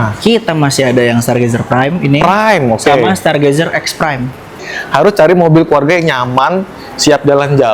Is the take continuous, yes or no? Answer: no